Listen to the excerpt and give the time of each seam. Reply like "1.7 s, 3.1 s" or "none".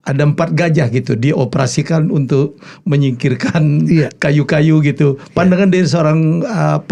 none